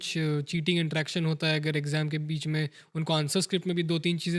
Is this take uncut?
yes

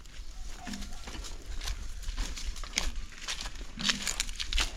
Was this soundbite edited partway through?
no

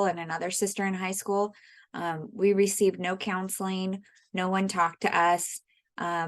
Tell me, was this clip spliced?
no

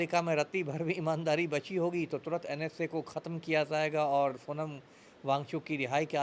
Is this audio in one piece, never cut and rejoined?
yes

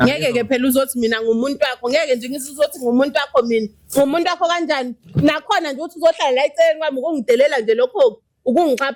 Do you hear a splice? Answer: no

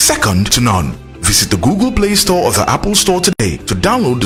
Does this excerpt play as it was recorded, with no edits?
yes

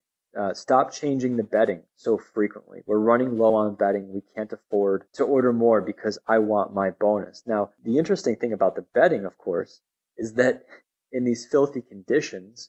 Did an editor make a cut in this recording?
yes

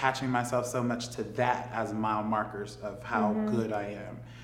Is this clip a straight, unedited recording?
yes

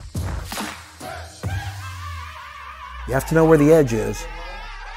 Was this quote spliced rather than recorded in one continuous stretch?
yes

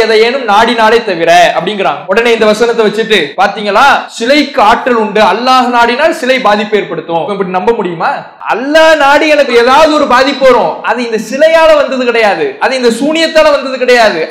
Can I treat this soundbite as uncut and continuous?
no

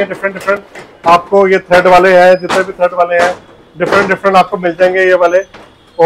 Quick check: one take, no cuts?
yes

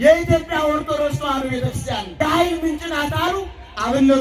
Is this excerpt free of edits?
no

